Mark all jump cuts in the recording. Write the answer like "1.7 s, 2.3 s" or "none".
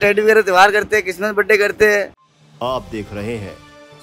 2.2 s